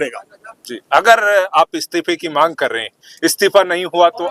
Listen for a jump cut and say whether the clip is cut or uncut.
uncut